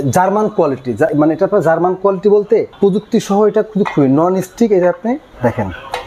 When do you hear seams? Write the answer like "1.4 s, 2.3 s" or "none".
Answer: none